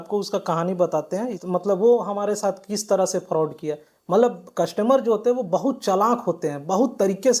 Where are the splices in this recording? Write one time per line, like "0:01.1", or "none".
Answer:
0:01.4